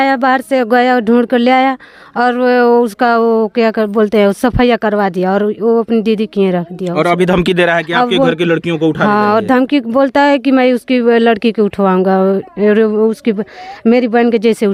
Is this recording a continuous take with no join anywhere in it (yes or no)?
yes